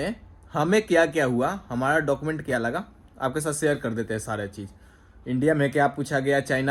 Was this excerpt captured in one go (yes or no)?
yes